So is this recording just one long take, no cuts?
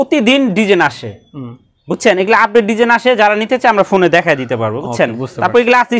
yes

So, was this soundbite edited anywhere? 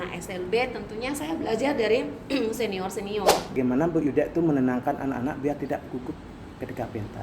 yes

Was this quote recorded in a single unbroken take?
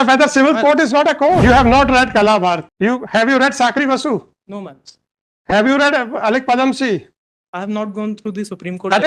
no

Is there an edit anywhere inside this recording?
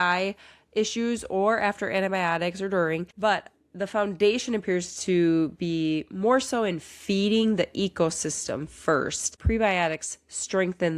yes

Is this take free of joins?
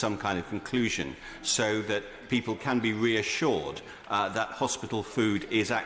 yes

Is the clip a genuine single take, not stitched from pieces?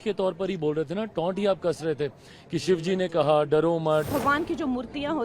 no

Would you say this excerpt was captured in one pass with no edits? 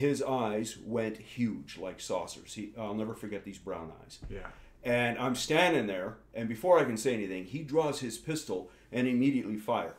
yes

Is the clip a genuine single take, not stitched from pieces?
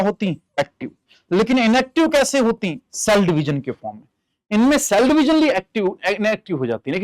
yes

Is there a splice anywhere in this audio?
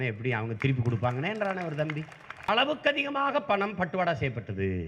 yes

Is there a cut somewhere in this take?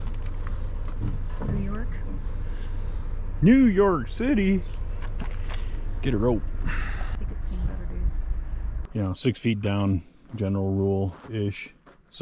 yes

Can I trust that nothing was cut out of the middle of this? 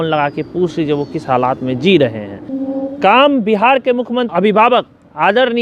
no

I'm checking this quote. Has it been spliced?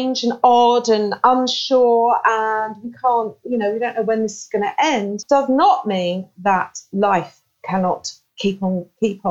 yes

